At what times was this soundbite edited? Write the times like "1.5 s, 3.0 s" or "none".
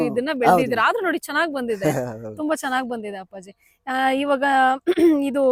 none